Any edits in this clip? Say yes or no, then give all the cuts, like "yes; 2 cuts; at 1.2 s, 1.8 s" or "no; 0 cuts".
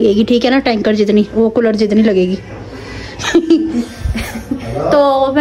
yes; 1 cut; at 2.8 s